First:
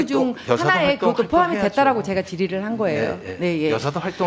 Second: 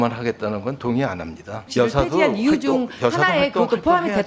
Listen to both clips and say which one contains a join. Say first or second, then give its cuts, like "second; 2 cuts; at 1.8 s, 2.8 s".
second; 1 cut; at 1.6 s